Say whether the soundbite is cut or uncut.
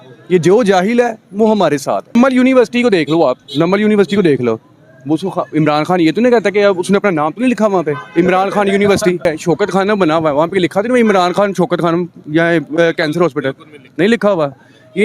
cut